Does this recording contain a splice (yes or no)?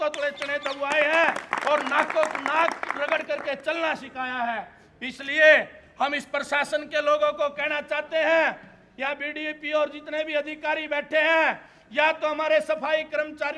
no